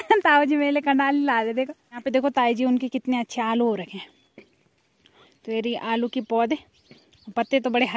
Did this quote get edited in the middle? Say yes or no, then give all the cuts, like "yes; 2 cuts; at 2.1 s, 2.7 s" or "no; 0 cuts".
yes; 1 cut; at 2.0 s